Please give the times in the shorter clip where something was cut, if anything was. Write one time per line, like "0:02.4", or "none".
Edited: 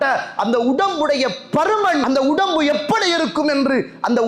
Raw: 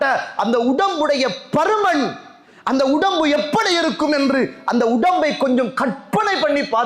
0:02.0